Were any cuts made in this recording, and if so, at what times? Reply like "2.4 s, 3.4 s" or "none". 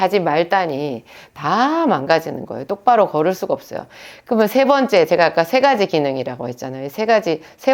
none